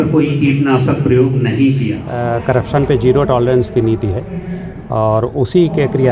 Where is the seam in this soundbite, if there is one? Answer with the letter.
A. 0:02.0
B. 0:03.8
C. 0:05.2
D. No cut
A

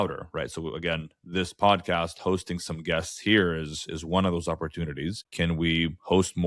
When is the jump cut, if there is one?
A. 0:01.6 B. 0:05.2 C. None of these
B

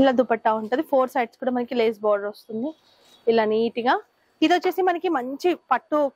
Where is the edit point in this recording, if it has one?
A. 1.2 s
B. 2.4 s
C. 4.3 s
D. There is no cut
D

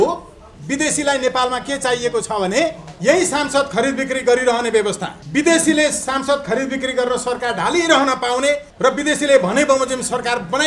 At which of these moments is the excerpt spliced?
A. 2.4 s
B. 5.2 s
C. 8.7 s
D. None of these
D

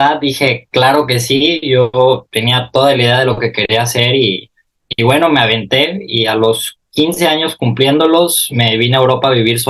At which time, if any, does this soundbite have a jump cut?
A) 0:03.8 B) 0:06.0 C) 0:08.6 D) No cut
D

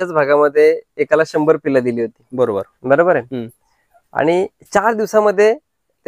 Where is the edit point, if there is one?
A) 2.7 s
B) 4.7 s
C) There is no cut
C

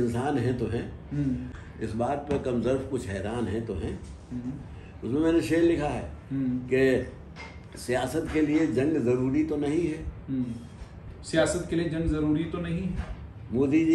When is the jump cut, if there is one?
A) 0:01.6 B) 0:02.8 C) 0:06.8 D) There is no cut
A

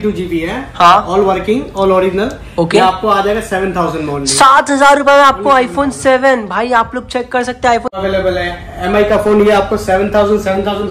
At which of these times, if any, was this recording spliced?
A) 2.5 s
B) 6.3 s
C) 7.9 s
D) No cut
C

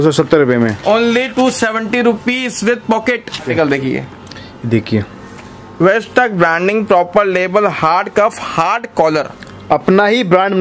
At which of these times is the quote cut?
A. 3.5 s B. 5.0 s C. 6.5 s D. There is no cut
A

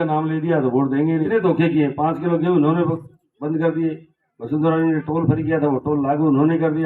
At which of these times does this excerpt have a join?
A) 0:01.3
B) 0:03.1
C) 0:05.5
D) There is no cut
A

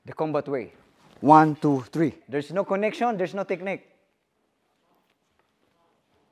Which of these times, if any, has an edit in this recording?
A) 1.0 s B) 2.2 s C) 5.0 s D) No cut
B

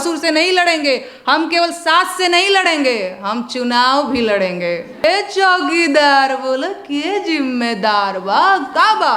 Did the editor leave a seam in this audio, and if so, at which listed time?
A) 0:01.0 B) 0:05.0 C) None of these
B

